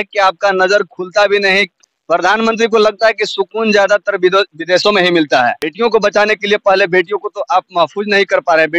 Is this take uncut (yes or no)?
no